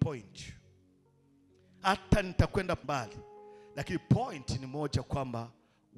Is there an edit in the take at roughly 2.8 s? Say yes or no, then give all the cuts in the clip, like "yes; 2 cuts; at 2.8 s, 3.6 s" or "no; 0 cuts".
yes; 1 cut; at 2.8 s